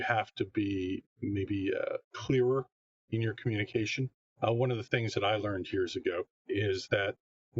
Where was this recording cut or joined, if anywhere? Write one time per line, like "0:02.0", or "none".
0:01.1
0:02.1
0:06.4